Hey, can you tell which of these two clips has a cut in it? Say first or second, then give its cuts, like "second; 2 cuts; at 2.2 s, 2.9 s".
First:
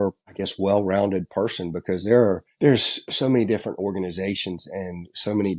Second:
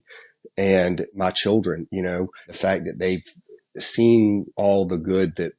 second; 1 cut; at 4.5 s